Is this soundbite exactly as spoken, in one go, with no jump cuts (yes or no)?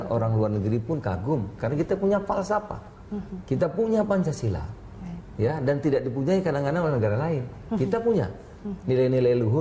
yes